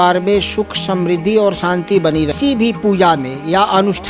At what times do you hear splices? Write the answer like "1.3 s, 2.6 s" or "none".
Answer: 2.3 s